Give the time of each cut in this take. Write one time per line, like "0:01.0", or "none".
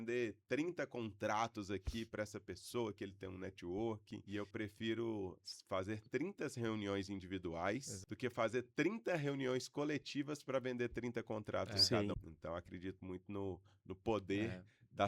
0:04.1
0:08.0
0:12.2